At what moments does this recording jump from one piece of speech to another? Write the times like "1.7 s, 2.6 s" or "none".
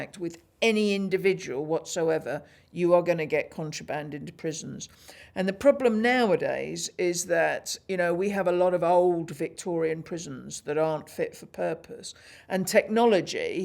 none

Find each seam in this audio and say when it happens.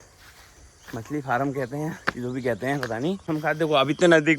3.2 s

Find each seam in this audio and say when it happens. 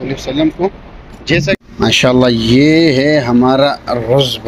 1.6 s

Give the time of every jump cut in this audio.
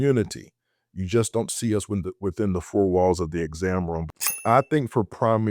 4.4 s

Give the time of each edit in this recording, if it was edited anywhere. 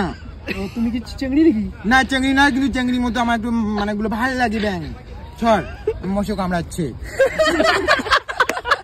none

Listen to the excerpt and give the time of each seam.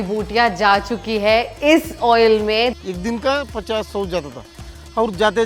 2.8 s

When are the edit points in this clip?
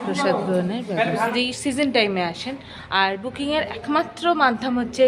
1.3 s

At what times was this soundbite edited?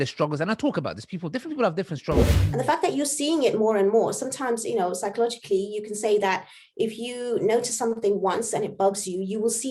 2.3 s

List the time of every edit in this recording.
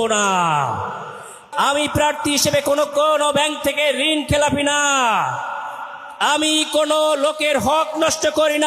1.5 s

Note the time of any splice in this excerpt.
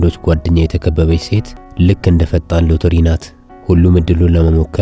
1.5 s

